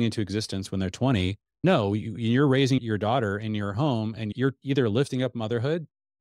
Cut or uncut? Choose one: cut